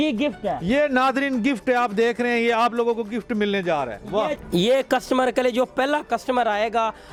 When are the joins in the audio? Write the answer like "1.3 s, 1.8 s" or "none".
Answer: none